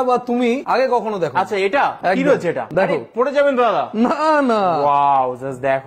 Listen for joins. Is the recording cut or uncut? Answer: uncut